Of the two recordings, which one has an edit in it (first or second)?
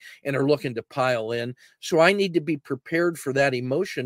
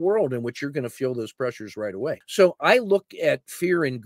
second